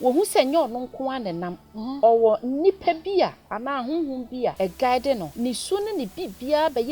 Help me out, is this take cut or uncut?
cut